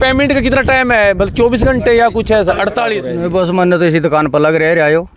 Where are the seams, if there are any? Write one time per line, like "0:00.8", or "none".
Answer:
0:03.1